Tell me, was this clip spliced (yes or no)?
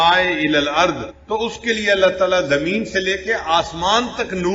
yes